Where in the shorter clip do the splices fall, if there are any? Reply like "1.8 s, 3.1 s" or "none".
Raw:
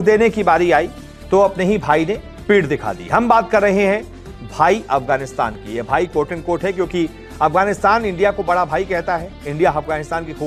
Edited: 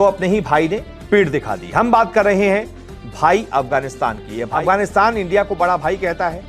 4.5 s